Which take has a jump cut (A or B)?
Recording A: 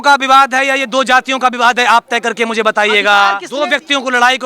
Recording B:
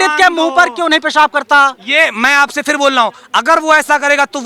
A